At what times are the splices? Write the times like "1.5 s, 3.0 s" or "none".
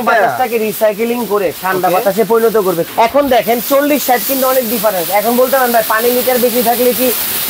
2.9 s